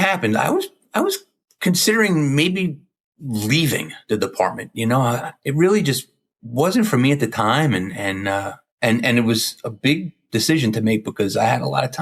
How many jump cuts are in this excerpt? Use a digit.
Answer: 0